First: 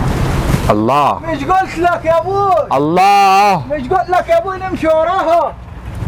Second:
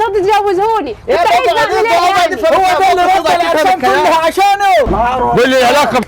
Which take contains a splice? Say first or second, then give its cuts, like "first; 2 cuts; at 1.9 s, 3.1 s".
second; 1 cut; at 4.9 s